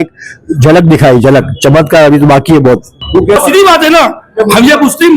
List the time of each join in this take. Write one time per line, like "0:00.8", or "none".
0:03.1